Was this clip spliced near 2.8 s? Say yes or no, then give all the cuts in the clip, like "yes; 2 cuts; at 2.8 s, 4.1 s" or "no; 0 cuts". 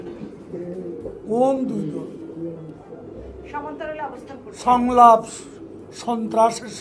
no; 0 cuts